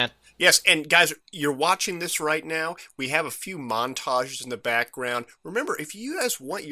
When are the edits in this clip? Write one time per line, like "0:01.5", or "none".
0:04.1